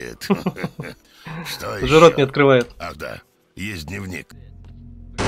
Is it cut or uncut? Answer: cut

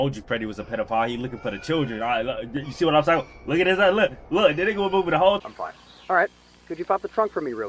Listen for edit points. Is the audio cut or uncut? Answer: cut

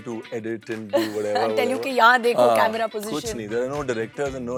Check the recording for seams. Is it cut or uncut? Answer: uncut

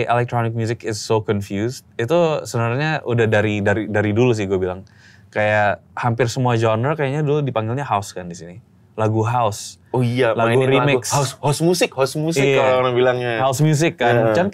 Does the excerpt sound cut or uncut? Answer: uncut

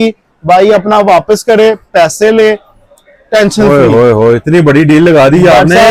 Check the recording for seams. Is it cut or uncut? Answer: uncut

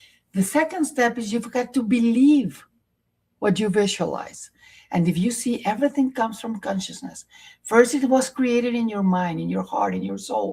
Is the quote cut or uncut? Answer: uncut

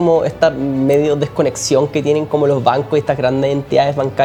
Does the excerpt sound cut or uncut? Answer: uncut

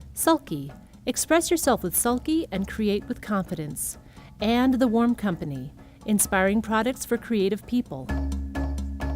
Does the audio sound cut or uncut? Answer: cut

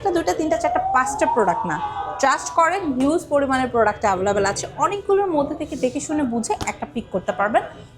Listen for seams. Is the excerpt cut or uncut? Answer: uncut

